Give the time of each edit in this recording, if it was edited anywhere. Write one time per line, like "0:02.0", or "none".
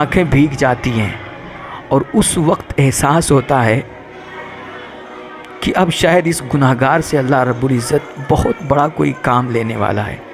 none